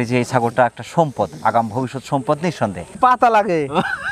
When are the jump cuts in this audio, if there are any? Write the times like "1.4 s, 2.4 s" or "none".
3.0 s